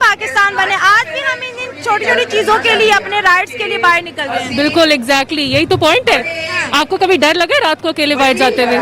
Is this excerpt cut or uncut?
uncut